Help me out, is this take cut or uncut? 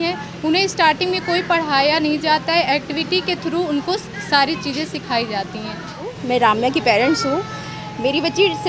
cut